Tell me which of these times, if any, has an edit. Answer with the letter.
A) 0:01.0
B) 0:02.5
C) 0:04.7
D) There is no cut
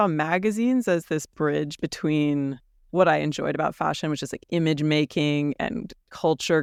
D